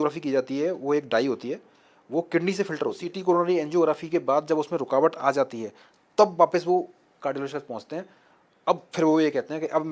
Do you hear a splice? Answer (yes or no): yes